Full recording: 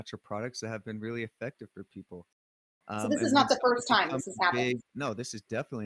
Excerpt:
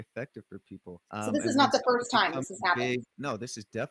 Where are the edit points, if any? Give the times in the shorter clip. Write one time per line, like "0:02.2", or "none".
0:01.0